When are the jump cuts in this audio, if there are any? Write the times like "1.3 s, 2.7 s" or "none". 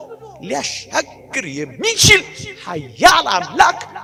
none

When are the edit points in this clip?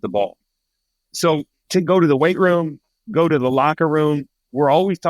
1.6 s

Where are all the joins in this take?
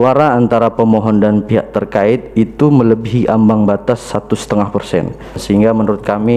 5.4 s

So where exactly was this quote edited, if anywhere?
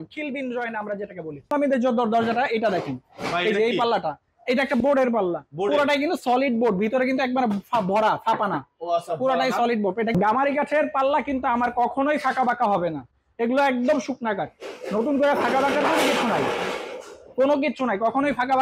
1.5 s, 10.1 s

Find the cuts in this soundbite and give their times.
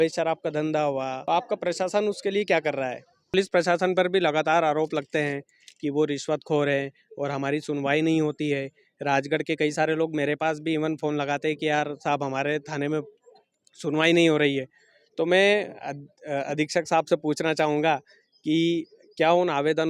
1.2 s, 3.3 s

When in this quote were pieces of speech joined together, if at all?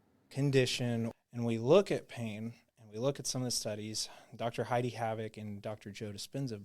1.1 s

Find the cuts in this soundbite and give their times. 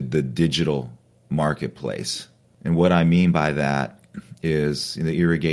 none

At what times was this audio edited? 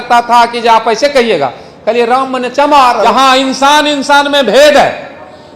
3.0 s

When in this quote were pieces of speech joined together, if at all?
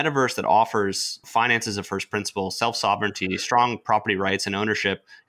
1.2 s

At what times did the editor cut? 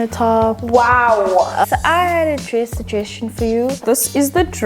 1.7 s, 3.8 s

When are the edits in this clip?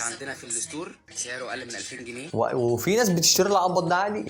2.2 s

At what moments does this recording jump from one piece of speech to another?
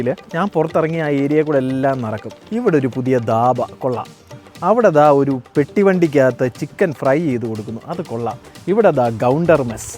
none

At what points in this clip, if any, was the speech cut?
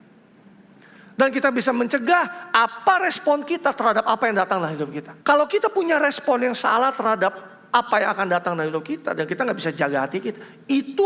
5.1 s

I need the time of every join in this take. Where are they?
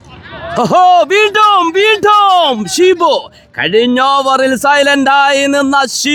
none

